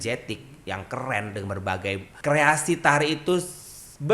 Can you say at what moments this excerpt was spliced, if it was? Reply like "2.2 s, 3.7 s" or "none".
2.1 s